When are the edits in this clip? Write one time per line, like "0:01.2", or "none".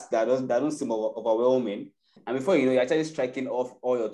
0:02.0